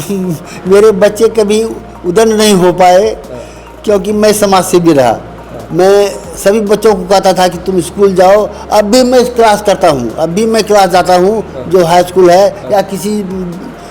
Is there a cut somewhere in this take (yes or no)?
no